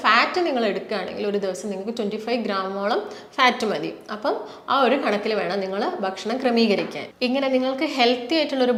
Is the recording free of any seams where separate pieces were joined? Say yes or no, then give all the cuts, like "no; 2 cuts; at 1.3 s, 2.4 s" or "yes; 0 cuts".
yes; 0 cuts